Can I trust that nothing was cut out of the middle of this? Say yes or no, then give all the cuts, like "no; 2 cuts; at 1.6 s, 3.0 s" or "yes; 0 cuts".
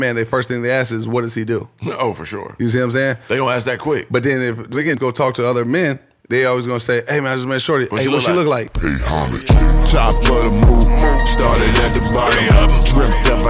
no; 1 cut; at 8.9 s